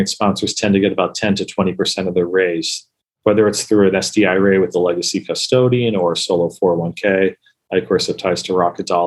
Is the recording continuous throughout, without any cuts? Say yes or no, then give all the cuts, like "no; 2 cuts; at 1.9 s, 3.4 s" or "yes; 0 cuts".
yes; 0 cuts